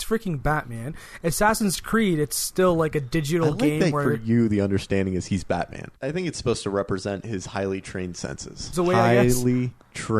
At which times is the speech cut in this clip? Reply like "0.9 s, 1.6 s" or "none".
5.9 s, 8.7 s